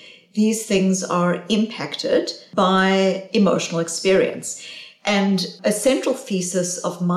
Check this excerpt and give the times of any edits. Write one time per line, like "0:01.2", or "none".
0:02.4
0:05.6